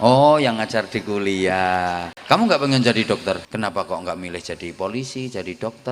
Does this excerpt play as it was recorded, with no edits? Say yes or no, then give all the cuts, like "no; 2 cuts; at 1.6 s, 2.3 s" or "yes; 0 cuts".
no; 2 cuts; at 2.1 s, 3.4 s